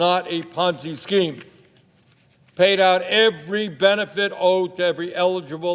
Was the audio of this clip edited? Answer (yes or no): no